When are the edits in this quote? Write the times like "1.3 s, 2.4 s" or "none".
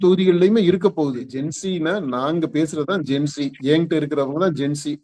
1.2 s